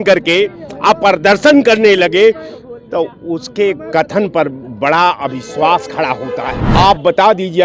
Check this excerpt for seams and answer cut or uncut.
cut